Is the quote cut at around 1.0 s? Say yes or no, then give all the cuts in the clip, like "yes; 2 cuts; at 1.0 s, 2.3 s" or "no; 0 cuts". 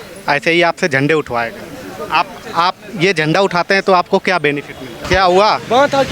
no; 1 cut; at 5.1 s